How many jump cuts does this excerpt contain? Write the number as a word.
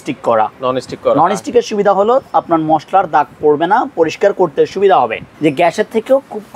one